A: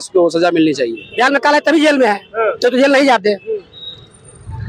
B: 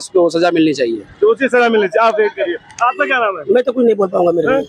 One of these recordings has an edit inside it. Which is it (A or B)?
A